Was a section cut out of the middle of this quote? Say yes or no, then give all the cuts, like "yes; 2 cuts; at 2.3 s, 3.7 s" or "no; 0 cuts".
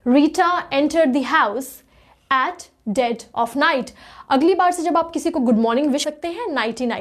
yes; 1 cut; at 6.0 s